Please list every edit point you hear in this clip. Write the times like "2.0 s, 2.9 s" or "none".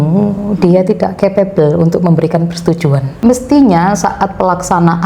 3.2 s